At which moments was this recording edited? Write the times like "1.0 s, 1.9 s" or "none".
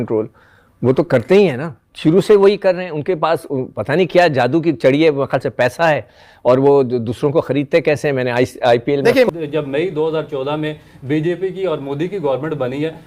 9.3 s